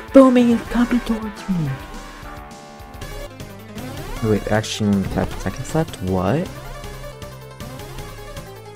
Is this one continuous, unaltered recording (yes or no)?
no